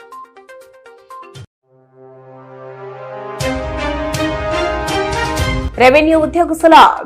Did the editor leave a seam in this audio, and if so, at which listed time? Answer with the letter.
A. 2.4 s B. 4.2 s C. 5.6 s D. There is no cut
C